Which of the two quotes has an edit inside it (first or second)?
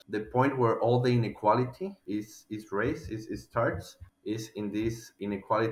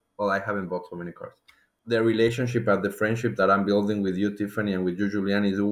second